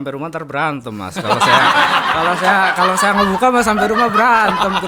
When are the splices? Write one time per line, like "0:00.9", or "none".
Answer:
none

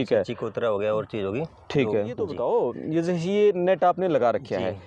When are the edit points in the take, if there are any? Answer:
0:02.3

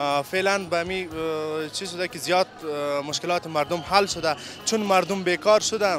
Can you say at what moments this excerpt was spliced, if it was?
none

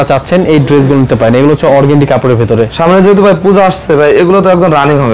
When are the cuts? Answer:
none

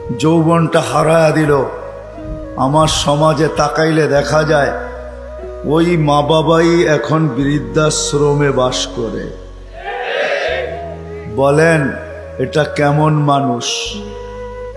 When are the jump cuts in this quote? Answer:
0:13.9

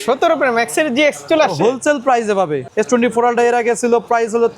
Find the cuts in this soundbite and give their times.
0:02.6

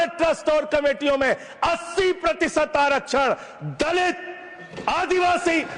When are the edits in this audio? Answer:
none

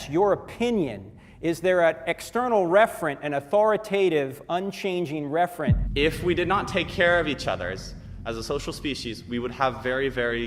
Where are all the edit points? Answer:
0:05.8

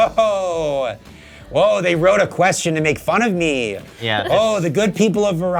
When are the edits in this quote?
none

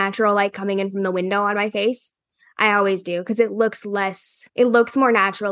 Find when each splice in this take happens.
none

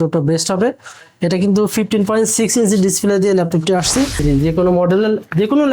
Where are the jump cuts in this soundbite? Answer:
0:04.2

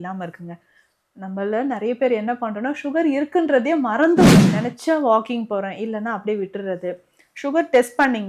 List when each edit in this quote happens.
0:04.3

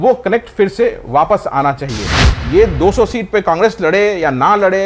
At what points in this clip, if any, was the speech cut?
0:02.3

